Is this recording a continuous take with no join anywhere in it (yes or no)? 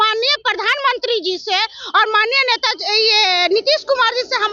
yes